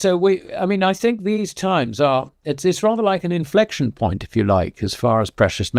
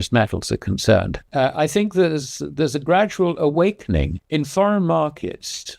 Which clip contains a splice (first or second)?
second